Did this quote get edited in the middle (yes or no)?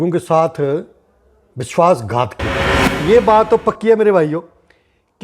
yes